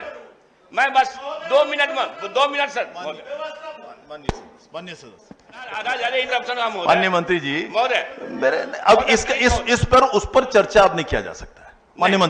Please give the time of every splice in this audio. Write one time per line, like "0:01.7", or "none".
0:05.8